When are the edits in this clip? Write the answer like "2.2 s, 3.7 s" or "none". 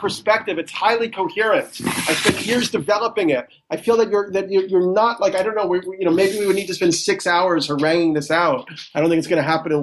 none